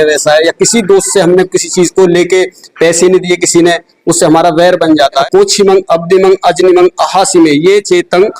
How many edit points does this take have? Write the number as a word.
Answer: one